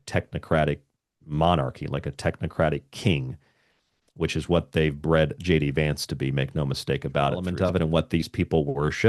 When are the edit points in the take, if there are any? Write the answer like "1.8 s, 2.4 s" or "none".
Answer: 7.5 s